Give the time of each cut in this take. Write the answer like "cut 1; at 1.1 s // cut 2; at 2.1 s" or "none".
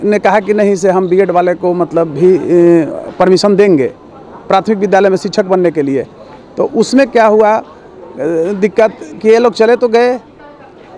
none